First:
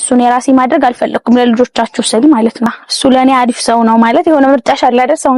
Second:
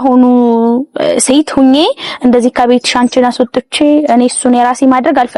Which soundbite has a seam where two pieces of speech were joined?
first; 1 cut; at 2.9 s

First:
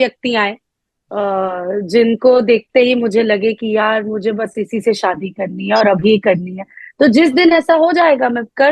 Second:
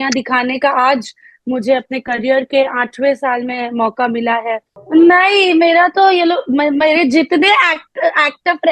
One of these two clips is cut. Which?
second; 1 cut; at 4.7 s

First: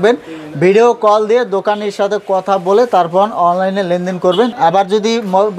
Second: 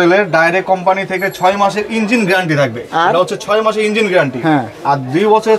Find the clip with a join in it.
first; 1 cut; at 4.5 s

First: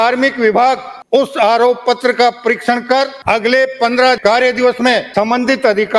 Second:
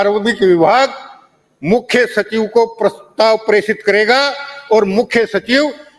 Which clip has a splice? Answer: first; 4 cuts; at 0.9 s, 3.2 s, 4.2 s, 5.1 s

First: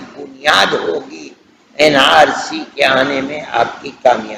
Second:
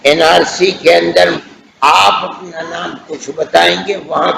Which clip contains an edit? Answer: second; 1 cut; at 1.4 s

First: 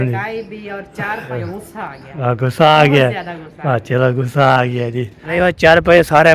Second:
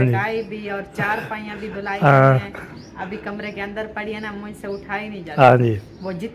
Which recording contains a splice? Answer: first; 2 cuts; at 1.4 s, 5.2 s

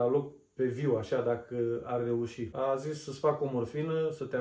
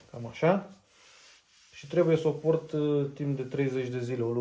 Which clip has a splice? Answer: first; 1 cut; at 2.4 s

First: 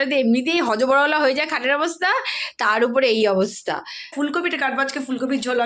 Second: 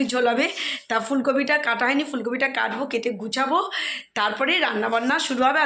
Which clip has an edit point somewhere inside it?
first; 1 cut; at 4.1 s

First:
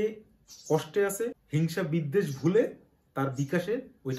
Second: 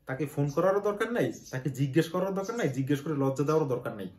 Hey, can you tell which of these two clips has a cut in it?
first; 1 cut; at 1.4 s

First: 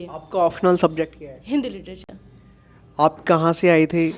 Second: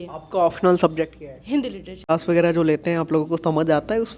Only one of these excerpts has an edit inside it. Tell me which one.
second; 1 cut; at 2.1 s

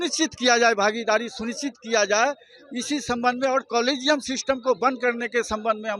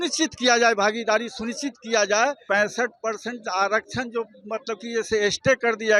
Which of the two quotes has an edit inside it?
second; 1 cut; at 2.4 s

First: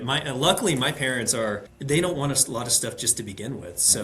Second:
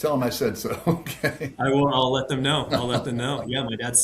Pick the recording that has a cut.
first; 1 cut; at 1.7 s

